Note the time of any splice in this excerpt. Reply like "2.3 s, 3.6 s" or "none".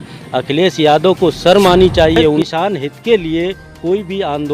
2.4 s